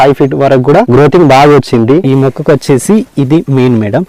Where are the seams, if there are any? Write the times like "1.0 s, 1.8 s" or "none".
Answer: 2.0 s